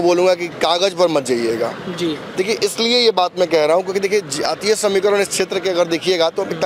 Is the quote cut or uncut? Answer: uncut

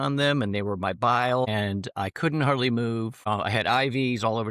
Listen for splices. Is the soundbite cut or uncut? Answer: cut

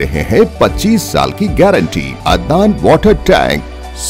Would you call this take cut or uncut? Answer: cut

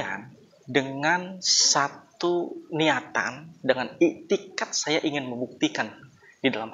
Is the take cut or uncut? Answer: uncut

